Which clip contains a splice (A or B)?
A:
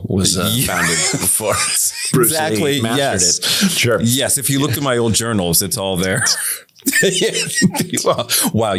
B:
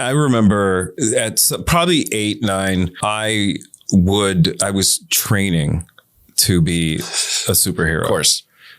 B